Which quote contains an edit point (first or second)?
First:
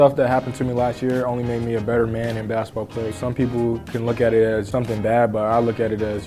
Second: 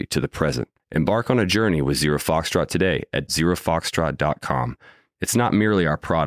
first